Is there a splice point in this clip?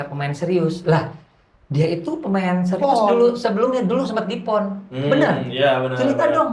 no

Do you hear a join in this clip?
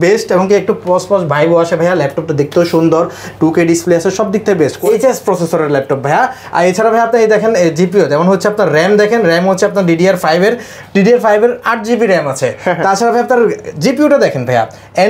yes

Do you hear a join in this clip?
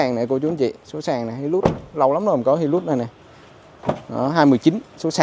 no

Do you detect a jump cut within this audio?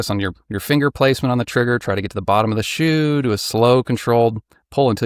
no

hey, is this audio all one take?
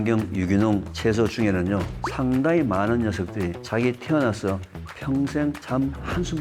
no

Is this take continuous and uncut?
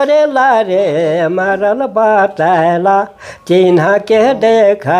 yes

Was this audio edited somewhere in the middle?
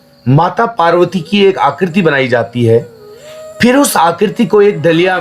no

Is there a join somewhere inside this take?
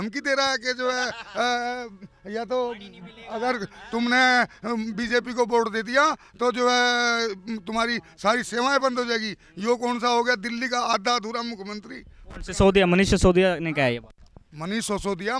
no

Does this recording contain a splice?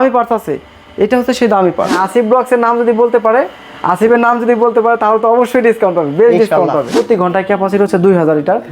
yes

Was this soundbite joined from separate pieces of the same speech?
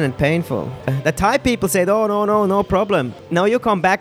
yes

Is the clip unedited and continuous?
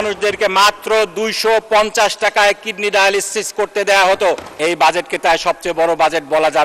no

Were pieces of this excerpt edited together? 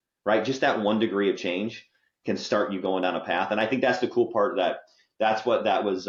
no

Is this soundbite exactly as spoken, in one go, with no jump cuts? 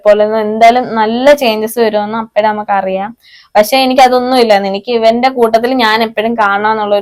yes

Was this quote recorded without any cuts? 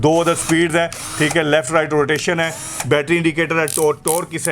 yes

